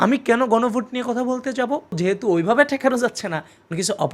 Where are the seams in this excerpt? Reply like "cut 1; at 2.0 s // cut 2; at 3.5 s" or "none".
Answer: cut 1; at 2.0 s